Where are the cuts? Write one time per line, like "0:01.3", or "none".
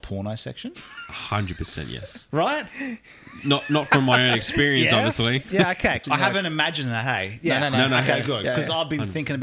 0:06.0